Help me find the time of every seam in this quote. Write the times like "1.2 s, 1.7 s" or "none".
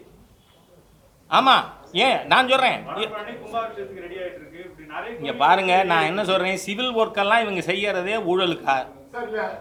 none